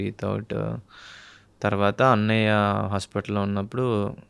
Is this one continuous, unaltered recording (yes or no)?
yes